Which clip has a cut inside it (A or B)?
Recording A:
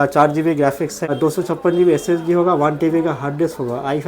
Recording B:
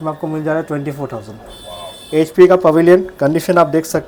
A